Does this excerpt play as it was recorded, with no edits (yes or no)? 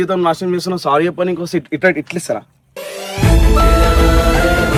yes